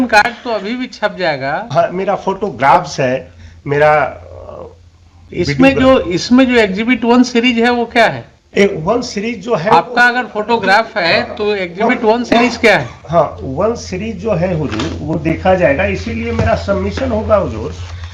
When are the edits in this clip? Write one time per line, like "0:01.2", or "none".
none